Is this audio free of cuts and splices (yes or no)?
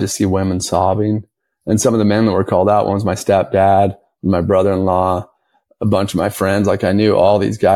yes